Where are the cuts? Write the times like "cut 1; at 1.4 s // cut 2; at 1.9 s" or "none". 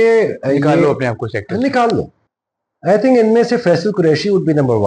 cut 1; at 2.2 s